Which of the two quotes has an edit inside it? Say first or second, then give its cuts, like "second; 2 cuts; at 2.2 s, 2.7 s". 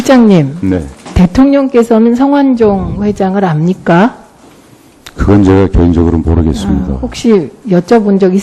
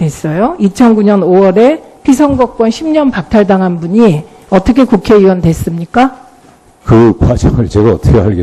second; 1 cut; at 3.8 s